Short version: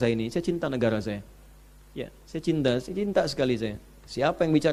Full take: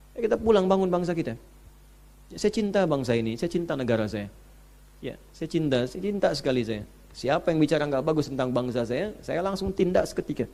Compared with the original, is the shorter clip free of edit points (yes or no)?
yes